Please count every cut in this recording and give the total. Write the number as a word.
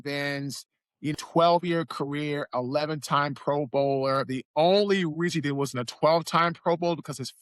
one